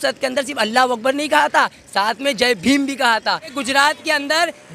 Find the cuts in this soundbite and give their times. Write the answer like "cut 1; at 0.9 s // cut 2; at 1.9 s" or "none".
cut 1; at 3.6 s